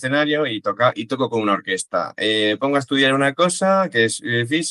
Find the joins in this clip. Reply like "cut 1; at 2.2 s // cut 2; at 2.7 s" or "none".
none